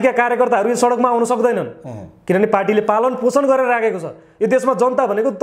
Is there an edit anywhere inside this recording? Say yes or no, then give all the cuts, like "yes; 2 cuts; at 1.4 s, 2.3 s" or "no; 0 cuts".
no; 0 cuts